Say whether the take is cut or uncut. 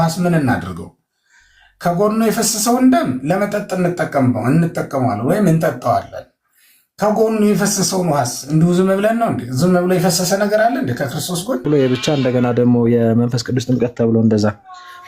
cut